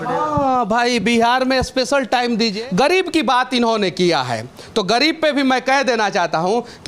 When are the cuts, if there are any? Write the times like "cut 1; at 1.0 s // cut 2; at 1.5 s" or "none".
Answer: cut 1; at 2.5 s